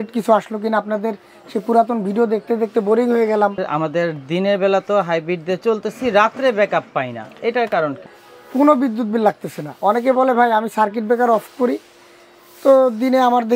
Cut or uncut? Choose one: cut